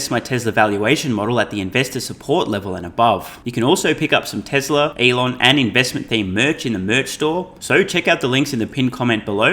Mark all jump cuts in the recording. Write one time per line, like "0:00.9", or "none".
0:03.4
0:04.9
0:07.6